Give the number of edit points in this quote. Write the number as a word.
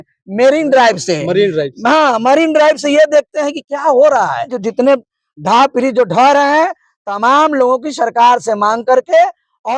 one